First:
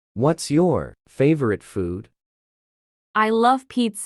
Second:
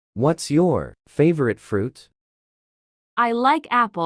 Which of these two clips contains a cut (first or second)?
first